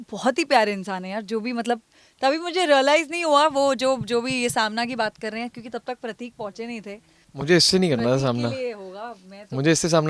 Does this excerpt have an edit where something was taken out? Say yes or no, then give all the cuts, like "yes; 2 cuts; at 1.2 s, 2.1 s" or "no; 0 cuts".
yes; 1 cut; at 7.1 s